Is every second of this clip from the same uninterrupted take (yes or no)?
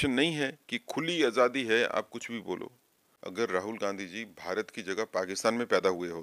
no